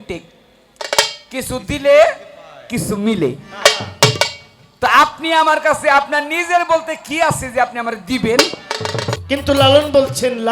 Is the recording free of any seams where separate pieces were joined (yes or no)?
no